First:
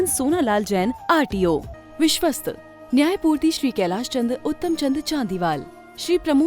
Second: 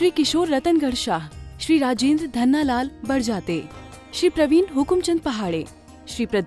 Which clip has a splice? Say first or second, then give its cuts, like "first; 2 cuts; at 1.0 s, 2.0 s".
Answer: first; 1 cut; at 1.8 s